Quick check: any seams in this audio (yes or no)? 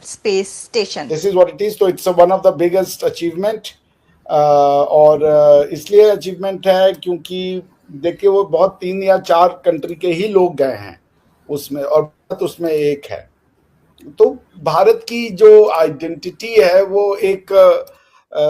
yes